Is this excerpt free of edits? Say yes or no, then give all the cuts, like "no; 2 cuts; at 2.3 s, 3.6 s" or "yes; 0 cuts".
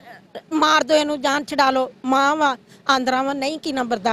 yes; 0 cuts